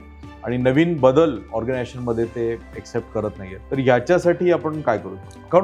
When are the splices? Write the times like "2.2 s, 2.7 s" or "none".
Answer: 3.5 s